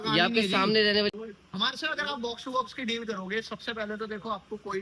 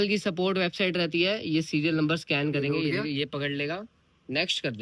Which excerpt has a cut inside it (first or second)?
first